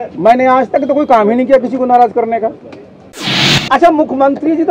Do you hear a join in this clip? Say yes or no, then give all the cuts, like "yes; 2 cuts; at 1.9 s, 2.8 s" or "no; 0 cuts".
yes; 1 cut; at 3.5 s